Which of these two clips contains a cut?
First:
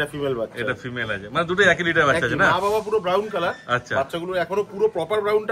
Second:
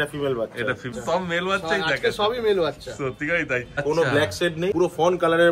second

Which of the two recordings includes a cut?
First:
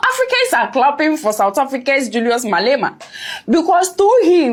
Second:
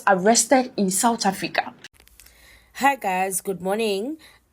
second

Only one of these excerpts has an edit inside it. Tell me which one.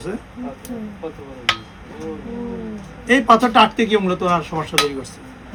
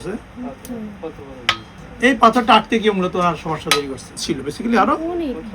second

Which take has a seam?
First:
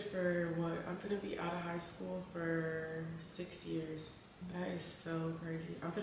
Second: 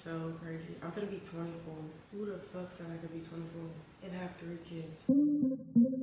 second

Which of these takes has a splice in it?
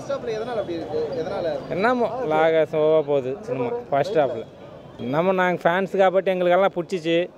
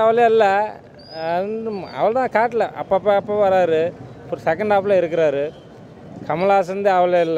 first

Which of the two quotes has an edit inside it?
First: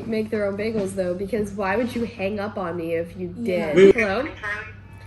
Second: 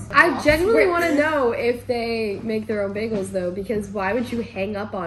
first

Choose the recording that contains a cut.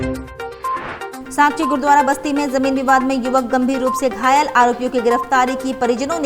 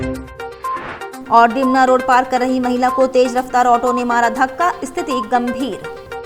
first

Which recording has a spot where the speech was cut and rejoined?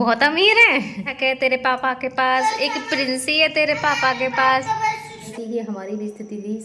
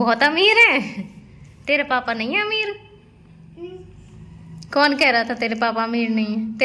first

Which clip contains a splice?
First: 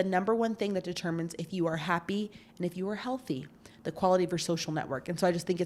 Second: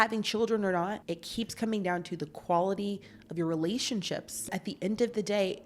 second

